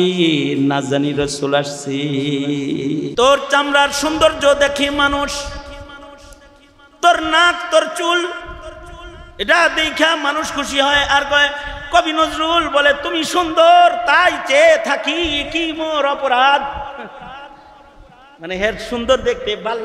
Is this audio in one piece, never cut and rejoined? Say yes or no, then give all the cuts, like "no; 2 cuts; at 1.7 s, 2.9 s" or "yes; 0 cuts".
no; 1 cut; at 3.1 s